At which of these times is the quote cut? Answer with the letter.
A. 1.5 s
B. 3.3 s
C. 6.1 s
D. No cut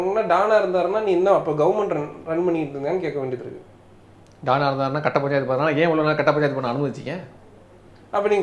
D